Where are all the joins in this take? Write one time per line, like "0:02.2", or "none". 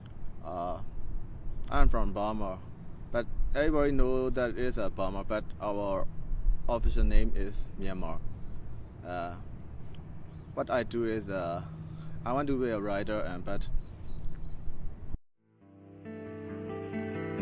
none